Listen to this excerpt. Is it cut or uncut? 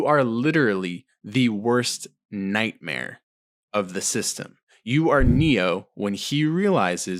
uncut